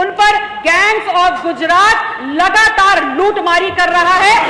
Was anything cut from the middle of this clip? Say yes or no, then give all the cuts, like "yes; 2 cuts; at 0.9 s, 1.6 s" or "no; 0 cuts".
no; 0 cuts